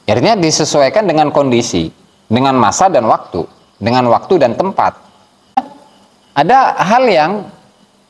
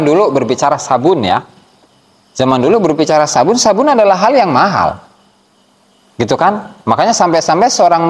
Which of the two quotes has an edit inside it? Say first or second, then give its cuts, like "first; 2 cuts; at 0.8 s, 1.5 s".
first; 1 cut; at 5.6 s